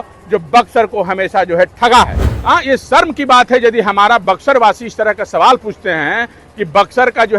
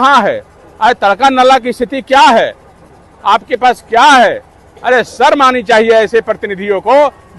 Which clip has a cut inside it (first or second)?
first